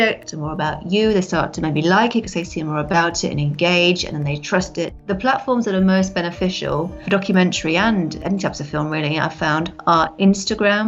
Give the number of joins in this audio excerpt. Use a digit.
3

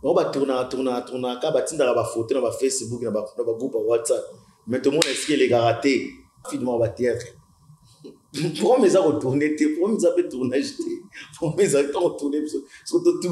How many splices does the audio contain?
1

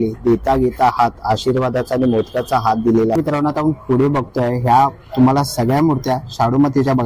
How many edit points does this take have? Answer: 1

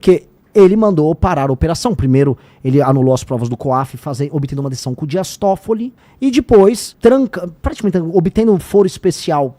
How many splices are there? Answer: 2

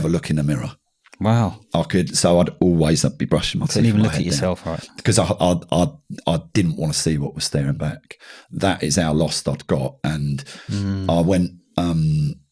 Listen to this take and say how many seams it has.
0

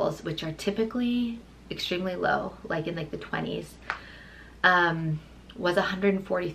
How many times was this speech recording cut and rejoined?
0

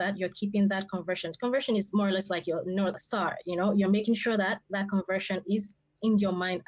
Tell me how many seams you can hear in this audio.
1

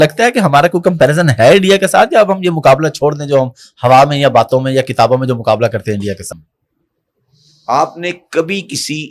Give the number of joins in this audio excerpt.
1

